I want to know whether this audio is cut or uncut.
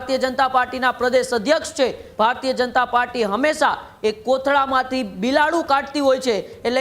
cut